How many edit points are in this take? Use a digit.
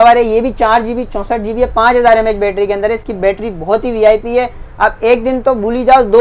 0